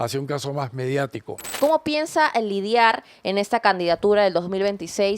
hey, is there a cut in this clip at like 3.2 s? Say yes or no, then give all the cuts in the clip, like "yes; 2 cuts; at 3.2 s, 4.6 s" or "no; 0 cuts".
no; 1 cut; at 1.6 s